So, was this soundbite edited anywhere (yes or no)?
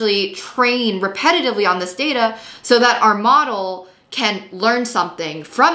no